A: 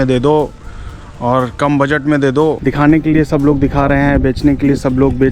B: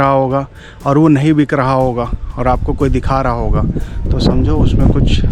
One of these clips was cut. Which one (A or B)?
A